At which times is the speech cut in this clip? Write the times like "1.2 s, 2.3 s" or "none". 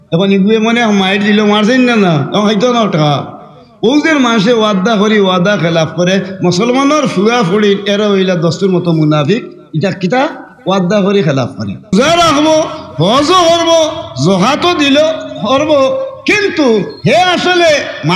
11.9 s